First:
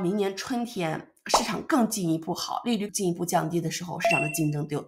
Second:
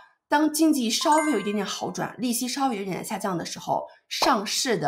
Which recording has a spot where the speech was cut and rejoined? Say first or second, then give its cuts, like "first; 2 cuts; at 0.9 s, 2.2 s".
first; 1 cut; at 2.9 s